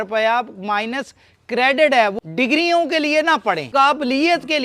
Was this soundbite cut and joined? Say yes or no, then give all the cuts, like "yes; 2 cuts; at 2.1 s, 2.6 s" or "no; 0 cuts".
yes; 2 cuts; at 2.2 s, 3.6 s